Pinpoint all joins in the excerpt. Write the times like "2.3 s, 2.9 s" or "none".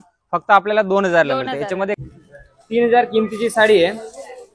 2.0 s